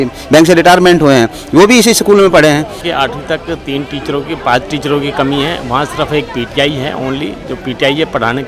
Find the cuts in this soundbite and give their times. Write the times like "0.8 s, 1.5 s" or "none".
2.8 s